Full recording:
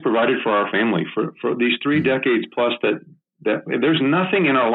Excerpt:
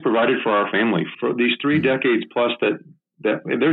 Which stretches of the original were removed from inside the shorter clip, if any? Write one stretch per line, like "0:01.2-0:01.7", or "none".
0:01.1-0:01.3